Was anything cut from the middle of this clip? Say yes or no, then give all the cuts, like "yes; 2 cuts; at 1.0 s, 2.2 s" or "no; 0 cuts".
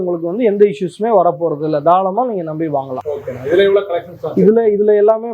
no; 0 cuts